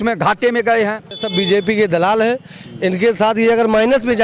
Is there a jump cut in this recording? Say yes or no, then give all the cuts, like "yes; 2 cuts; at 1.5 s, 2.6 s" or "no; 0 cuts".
yes; 1 cut; at 1.2 s